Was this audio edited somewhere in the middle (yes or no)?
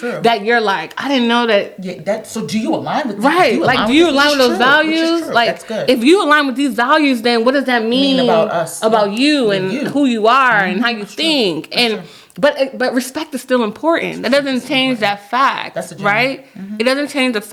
no